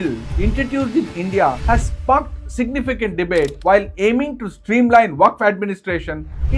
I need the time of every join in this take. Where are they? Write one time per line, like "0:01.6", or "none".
none